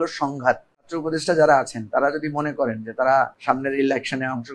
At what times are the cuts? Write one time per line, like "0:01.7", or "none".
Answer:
0:00.9
0:03.4